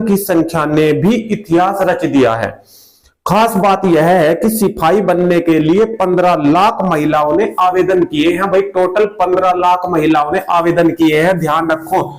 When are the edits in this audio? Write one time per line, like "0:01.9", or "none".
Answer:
none